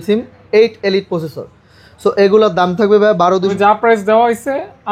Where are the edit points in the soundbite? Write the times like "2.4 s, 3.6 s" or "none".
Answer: 3.5 s